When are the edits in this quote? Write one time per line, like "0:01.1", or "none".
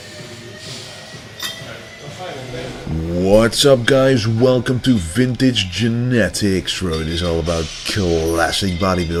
none